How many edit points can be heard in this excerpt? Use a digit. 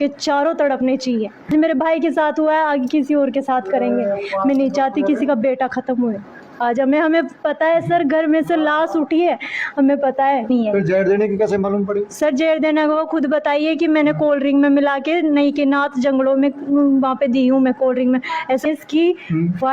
3